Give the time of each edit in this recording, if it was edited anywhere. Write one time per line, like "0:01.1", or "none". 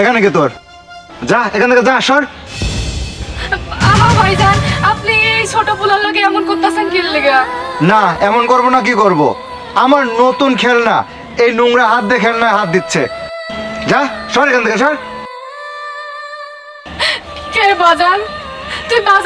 none